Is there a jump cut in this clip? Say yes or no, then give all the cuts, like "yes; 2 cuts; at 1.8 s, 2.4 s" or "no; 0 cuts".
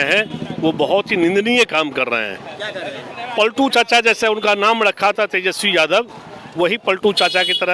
no; 0 cuts